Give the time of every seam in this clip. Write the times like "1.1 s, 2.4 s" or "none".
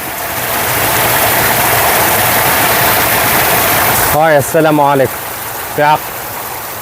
3.9 s